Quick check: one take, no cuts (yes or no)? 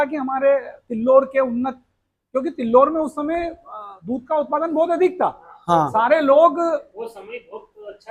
yes